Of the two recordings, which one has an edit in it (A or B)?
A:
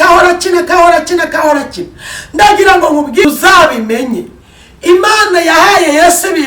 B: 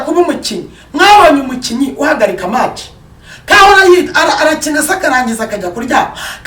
A